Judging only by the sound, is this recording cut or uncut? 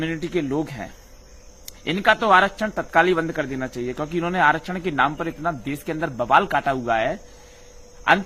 uncut